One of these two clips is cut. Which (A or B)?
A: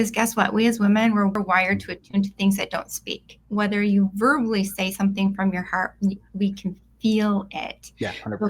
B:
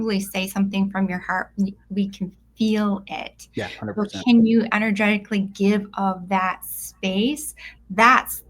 A